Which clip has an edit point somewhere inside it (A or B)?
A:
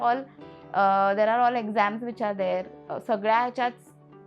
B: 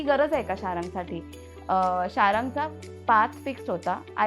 B